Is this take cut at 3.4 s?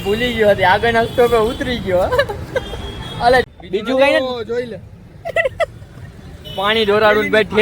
yes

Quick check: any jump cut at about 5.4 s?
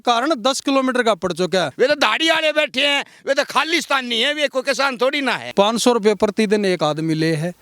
yes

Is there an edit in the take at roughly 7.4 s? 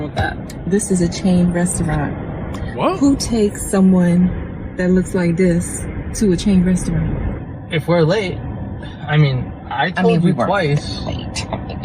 yes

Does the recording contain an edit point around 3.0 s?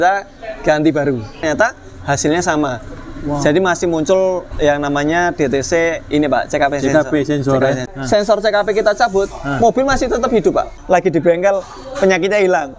no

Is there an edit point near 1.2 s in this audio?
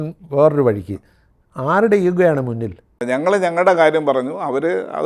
no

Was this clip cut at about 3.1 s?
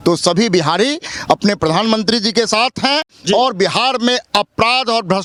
no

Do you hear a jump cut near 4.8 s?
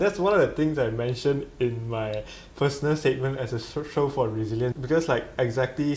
yes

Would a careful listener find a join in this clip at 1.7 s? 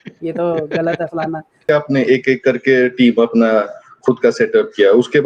yes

